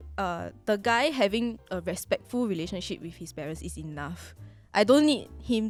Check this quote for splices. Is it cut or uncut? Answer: uncut